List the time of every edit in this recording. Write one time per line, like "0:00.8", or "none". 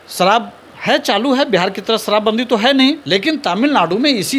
0:03.0